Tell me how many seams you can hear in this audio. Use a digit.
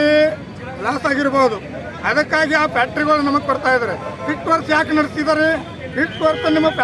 1